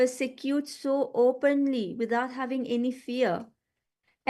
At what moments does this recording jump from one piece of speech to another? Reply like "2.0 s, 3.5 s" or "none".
0.9 s, 2.5 s